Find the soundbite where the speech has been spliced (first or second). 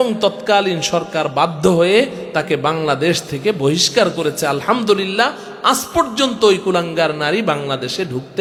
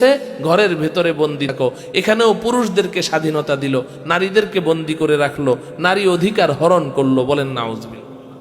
second